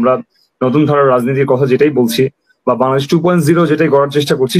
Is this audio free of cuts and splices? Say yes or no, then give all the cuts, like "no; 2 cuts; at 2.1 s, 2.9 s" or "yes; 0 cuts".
yes; 0 cuts